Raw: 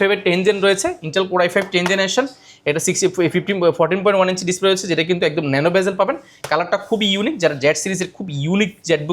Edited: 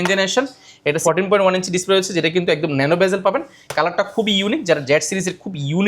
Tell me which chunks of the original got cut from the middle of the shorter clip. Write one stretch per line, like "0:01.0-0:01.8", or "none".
0:02.8-0:03.8